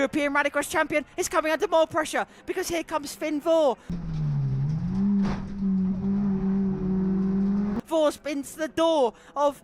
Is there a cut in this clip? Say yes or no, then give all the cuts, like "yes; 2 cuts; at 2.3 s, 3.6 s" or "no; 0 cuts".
yes; 1 cut; at 7.8 s